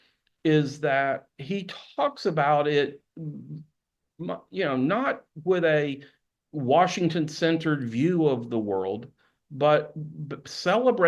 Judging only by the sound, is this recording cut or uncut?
uncut